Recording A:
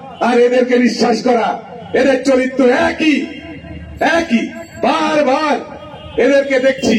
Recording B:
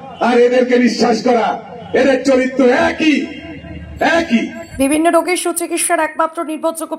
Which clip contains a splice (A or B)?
B